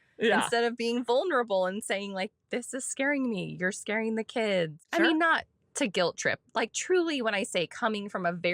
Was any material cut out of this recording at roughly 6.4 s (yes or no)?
no